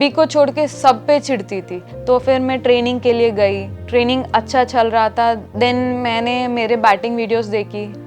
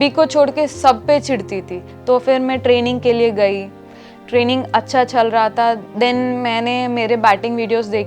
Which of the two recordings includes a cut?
first; 1 cut; at 3.7 s

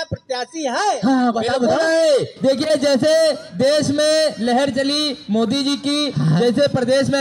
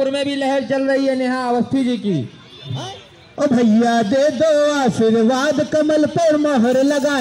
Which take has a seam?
second; 1 cut; at 2.8 s

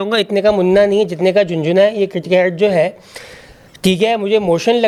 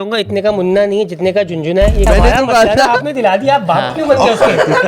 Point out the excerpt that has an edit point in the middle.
second; 1 cut; at 2.1 s

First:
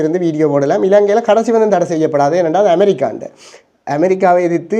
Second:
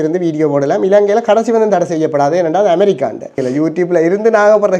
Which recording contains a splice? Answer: second; 1 cut; at 3.4 s

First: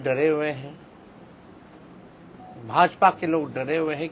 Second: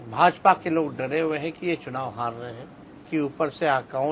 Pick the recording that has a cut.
second; 1 cut; at 3.1 s

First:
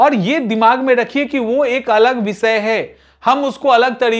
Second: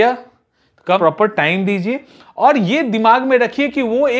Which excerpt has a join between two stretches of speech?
second; 1 cut; at 1.0 s

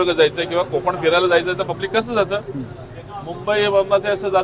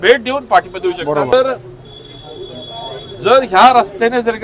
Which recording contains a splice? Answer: second; 1 cut; at 1.3 s

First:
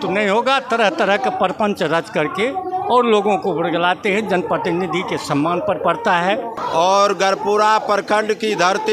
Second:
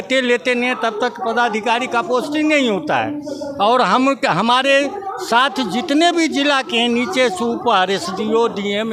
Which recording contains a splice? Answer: first; 1 cut; at 6.6 s

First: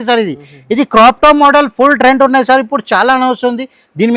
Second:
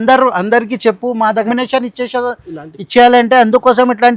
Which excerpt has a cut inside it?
second; 1 cut; at 1.5 s

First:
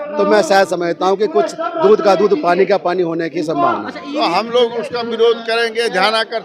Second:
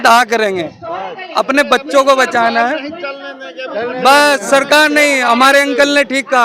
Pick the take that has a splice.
first; 1 cut; at 4.0 s

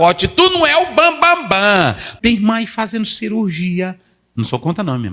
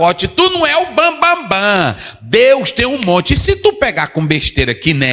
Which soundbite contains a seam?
first; 1 cut; at 2.1 s

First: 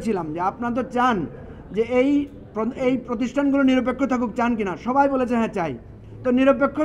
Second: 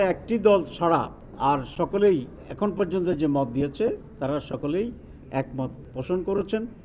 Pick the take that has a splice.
second; 4 cuts; at 1.2 s, 2.4 s, 4.1 s, 5.9 s

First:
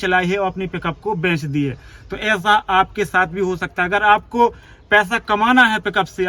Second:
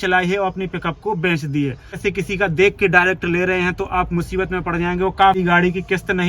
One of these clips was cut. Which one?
second; 2 cuts; at 1.9 s, 5.4 s

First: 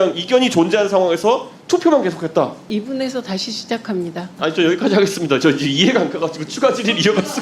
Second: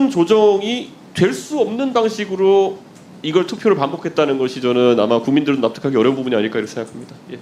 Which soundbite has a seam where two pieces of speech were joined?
first; 2 cuts; at 2.7 s, 4.3 s

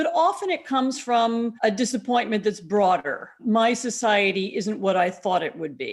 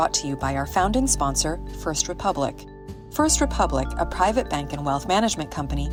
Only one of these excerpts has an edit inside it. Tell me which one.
first; 2 cuts; at 1.5 s, 3.3 s

